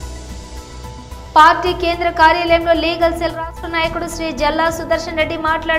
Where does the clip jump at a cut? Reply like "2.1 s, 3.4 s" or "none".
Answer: 1.1 s